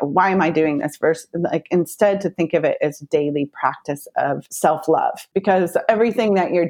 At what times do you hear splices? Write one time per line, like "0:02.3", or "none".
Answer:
0:04.5
0:05.2